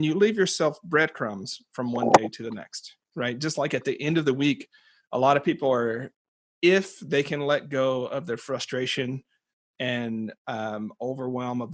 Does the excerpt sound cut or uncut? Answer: uncut